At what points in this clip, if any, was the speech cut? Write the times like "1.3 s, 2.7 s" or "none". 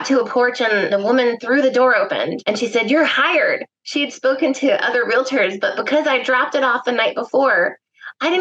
0.9 s, 2.4 s